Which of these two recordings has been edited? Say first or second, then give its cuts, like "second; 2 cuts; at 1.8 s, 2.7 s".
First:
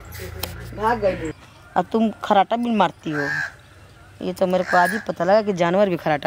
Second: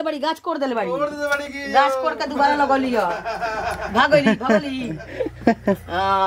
first; 1 cut; at 1.4 s